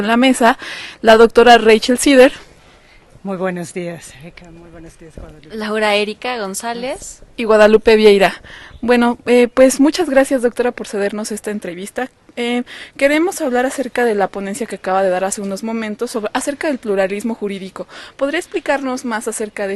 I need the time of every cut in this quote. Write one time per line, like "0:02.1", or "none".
0:11.3